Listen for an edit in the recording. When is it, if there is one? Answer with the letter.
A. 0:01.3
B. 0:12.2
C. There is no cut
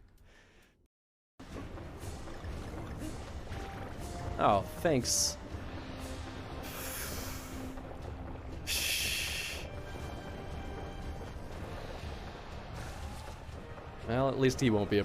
A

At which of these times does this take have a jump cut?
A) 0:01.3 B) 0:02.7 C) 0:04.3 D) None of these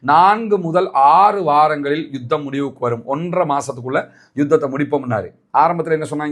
D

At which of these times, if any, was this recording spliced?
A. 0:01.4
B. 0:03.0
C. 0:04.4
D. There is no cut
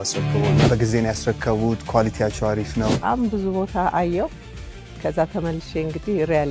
B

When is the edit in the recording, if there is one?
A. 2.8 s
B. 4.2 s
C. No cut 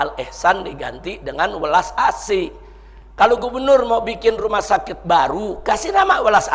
C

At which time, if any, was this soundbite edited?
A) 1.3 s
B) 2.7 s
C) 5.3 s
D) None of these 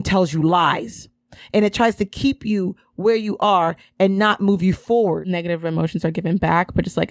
C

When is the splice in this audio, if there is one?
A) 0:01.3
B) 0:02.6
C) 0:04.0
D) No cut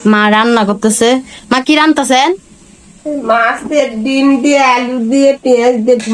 D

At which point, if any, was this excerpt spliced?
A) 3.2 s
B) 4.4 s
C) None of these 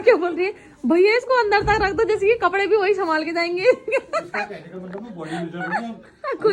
C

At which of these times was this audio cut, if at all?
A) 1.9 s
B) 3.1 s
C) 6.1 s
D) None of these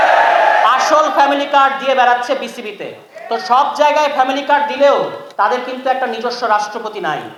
D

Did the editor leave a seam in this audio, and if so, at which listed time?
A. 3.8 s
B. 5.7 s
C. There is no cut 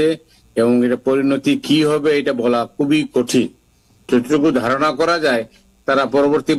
A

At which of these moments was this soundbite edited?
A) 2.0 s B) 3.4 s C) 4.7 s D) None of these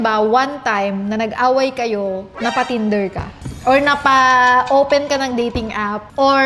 D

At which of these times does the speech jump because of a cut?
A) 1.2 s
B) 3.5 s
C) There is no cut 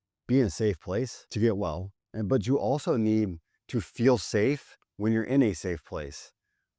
A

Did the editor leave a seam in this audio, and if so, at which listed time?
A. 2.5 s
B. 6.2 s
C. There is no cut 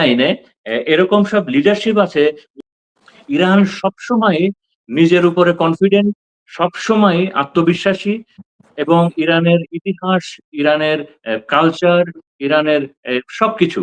A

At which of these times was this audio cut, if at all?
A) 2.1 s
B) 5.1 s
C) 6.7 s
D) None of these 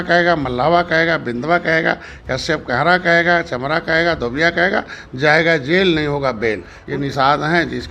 C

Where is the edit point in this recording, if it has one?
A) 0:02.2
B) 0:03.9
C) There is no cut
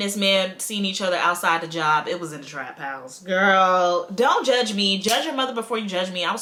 C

